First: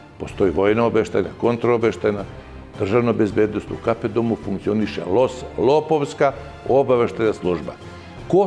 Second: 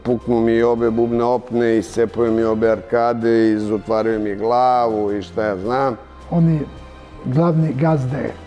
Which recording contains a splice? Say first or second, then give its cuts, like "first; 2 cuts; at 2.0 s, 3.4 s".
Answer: second; 1 cut; at 6.1 s